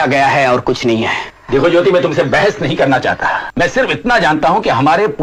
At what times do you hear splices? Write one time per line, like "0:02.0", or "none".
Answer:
none